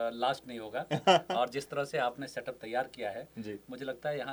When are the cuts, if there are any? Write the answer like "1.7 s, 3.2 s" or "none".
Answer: none